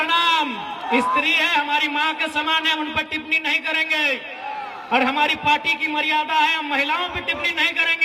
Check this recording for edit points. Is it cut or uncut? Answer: uncut